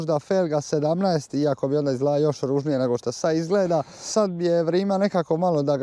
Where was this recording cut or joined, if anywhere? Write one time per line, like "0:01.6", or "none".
0:03.9